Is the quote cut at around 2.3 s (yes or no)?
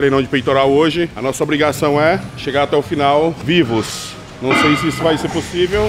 yes